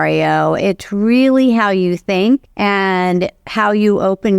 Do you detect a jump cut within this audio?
yes; 1 cut; at 2.5 s

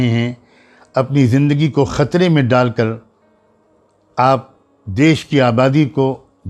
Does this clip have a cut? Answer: no; 0 cuts

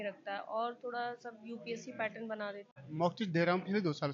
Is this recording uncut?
no; 1 cut; at 2.7 s

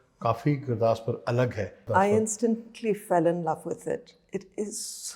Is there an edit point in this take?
yes; 1 cut; at 1.8 s

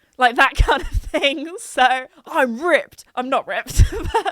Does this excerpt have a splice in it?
yes; 1 cut; at 2.2 s

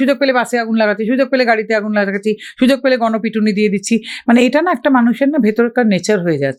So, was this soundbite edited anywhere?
no; 0 cuts

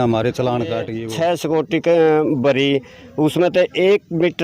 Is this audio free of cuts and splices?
no; 1 cut; at 1.0 s

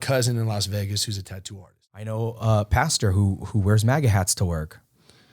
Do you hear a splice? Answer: yes; 1 cut; at 2.1 s

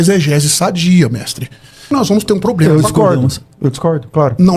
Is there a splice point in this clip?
yes; 1 cut; at 1.9 s

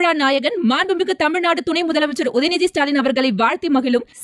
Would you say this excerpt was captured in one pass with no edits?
yes; 0 cuts

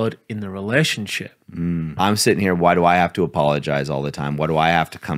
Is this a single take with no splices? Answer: no; 1 cut; at 2.0 s

